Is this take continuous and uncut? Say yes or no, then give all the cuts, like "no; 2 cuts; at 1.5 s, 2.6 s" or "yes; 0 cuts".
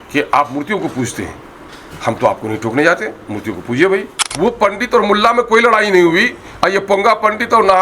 no; 1 cut; at 4.2 s